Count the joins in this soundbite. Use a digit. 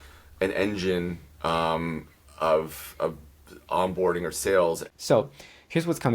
1